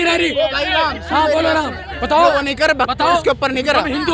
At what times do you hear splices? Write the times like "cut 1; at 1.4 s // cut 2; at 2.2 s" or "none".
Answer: none